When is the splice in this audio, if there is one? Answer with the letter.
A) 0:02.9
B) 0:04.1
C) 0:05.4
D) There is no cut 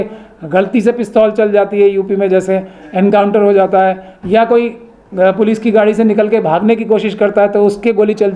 D